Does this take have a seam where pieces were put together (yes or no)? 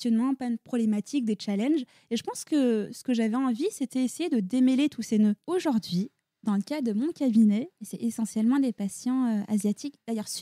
yes